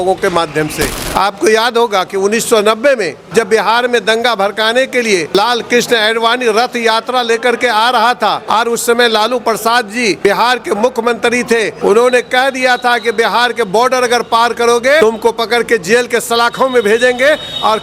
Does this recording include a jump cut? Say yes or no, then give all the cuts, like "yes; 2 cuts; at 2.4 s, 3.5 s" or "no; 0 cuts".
yes; 7 cuts; at 0.9 s, 3.2 s, 5.3 s, 8.4 s, 10.2 s, 11.7 s, 15.0 s